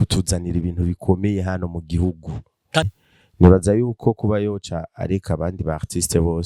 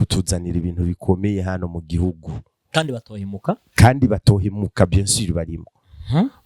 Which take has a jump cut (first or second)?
first